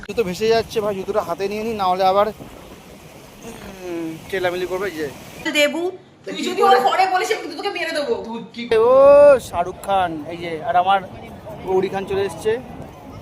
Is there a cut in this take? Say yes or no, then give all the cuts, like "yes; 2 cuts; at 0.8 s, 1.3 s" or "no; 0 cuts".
yes; 2 cuts; at 5.5 s, 8.7 s